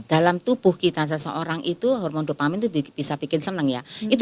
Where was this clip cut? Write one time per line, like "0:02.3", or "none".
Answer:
none